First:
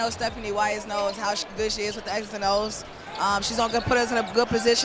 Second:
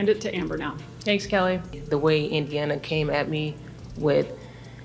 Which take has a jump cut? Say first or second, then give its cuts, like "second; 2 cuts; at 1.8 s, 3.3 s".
second; 1 cut; at 1.7 s